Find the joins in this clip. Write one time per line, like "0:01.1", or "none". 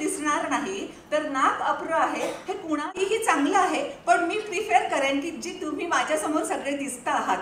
0:02.9